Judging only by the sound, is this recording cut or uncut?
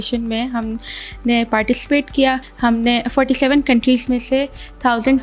cut